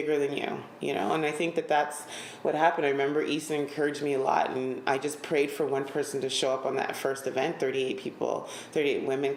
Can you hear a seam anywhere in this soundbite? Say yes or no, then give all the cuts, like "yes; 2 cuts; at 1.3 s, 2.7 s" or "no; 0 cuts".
no; 0 cuts